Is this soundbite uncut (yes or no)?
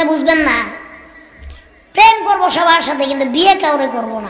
yes